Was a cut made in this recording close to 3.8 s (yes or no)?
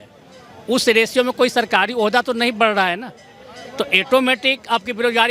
no